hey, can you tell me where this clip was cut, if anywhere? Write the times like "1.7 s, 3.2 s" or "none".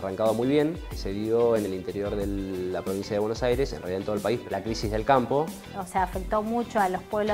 1.0 s, 4.4 s, 5.7 s